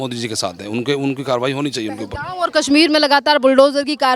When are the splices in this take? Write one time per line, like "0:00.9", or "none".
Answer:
none